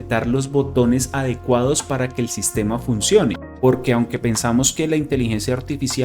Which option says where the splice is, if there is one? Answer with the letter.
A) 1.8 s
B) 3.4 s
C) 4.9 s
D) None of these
B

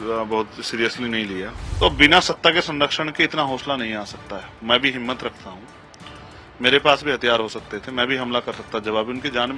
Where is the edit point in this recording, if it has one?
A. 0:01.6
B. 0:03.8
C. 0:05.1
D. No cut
A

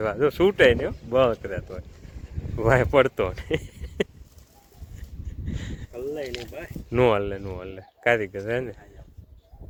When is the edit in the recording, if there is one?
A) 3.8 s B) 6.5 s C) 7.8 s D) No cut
D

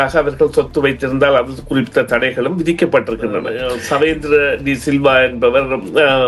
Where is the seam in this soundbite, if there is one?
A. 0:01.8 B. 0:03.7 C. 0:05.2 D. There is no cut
B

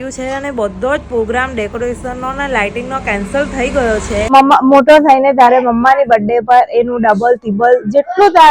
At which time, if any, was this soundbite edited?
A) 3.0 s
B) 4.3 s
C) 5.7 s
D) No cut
B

